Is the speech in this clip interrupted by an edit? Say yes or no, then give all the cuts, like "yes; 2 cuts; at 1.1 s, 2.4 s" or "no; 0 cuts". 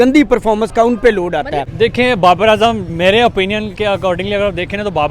yes; 1 cut; at 1.7 s